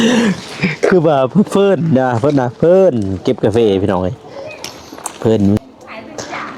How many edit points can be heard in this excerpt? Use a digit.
1